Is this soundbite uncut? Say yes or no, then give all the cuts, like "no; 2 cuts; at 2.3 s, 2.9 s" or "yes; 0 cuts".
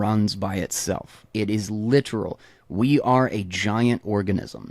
no; 1 cut; at 1.2 s